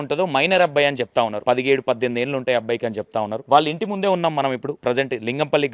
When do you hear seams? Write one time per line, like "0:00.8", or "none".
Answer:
0:01.4
0:03.4
0:04.7